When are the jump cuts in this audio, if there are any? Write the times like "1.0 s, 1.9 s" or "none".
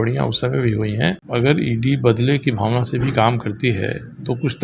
1.2 s